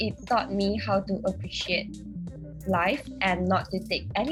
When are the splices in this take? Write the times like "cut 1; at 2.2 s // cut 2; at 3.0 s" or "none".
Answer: none